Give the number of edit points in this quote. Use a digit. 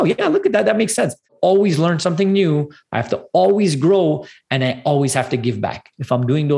1